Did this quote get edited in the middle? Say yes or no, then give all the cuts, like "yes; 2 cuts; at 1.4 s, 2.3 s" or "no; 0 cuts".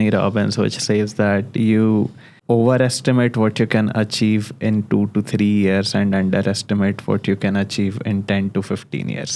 yes; 1 cut; at 2.3 s